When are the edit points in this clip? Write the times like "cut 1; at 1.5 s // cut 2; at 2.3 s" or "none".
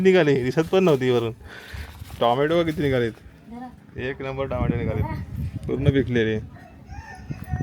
none